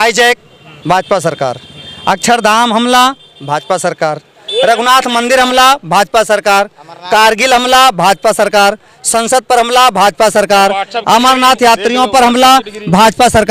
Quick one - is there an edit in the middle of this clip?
no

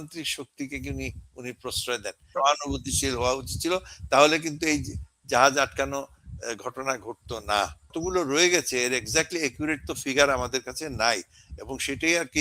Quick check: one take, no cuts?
no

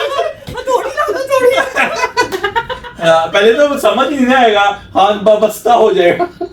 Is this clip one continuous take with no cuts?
yes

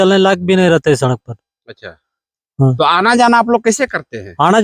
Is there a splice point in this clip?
no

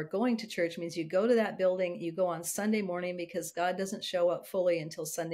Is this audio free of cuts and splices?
yes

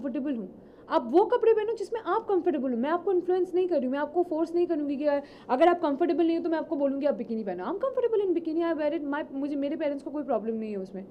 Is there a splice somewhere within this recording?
no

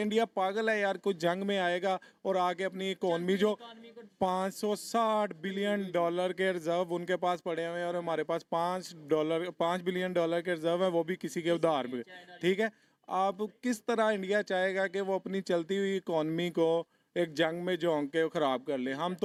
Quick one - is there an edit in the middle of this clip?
no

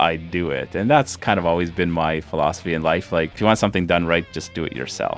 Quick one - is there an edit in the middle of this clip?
no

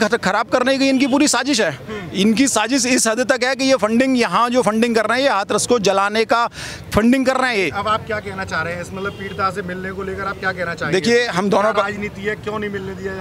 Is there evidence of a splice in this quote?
no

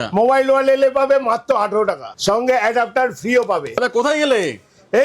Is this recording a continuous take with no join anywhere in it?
no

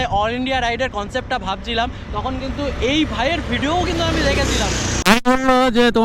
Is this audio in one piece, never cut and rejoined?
no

